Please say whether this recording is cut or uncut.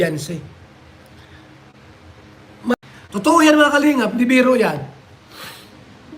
cut